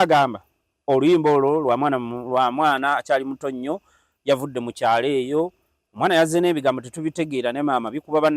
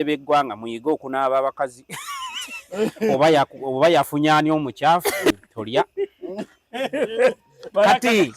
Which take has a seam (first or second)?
second